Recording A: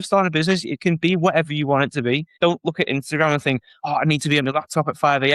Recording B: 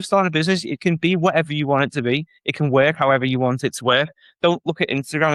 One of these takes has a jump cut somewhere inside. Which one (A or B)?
A